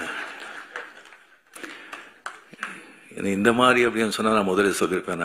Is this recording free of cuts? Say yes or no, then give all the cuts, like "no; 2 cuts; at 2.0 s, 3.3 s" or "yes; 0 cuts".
yes; 0 cuts